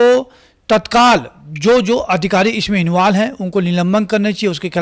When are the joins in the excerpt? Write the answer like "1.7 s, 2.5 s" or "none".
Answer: none